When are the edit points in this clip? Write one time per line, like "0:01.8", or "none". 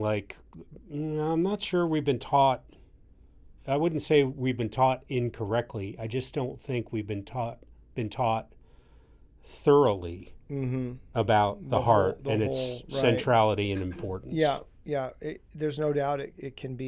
0:03.5